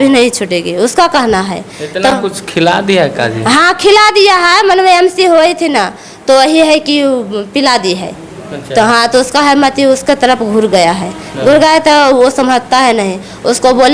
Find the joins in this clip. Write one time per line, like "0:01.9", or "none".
none

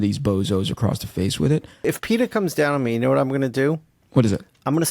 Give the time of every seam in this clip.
0:01.8

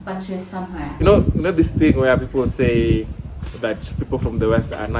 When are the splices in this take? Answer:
0:01.0

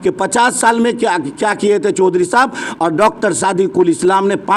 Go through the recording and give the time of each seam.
none

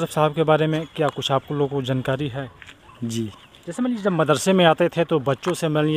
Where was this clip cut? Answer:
none

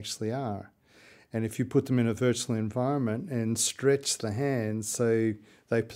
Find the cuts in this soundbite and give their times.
none

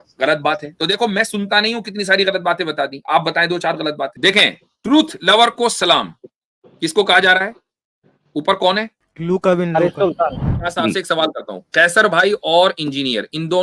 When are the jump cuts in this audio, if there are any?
0:04.1
0:09.0
0:10.6

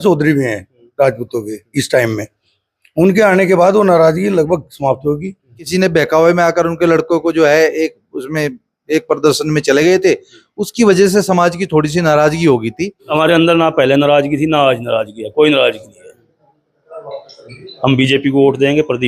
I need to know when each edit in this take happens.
0:05.7
0:13.1

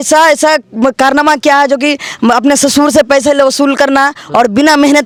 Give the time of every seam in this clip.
none

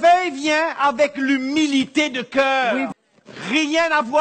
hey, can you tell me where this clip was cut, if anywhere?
0:02.9

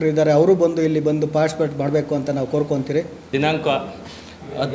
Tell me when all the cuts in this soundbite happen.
0:03.2

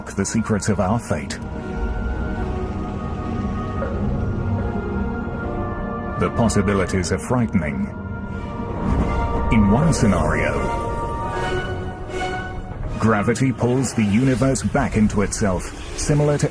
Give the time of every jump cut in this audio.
0:09.5

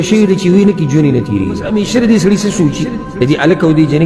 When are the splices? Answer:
0:01.6

